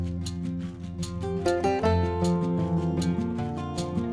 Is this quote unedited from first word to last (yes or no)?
no